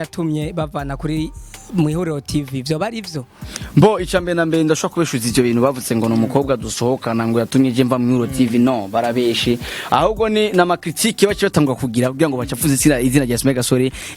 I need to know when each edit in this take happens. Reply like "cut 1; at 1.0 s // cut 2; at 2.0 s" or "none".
none